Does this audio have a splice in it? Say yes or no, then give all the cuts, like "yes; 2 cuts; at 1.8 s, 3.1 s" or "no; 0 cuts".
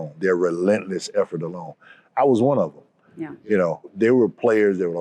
yes; 1 cut; at 3.9 s